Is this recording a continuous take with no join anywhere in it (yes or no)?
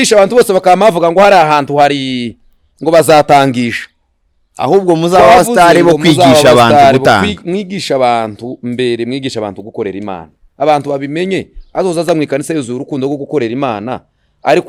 yes